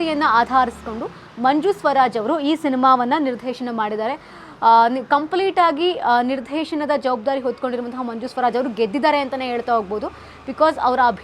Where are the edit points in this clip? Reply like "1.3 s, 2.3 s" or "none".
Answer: none